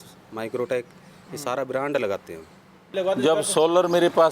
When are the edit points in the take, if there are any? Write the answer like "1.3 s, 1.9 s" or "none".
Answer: 2.9 s